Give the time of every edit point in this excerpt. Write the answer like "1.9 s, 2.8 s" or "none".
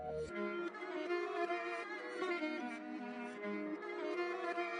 none